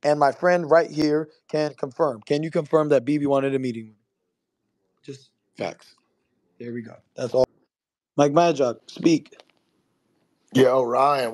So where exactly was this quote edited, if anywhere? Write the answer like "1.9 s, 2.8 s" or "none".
7.5 s